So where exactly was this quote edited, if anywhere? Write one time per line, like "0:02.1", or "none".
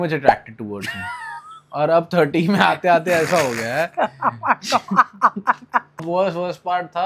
0:06.0